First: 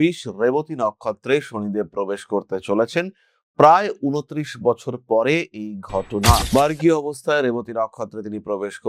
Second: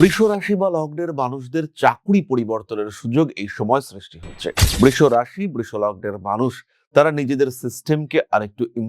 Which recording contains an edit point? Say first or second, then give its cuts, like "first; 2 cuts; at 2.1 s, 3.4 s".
second; 1 cut; at 4.6 s